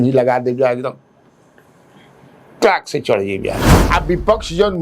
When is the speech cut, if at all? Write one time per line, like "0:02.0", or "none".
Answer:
0:03.7